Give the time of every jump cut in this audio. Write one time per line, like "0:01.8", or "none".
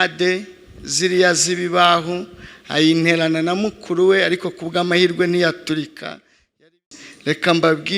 0:06.6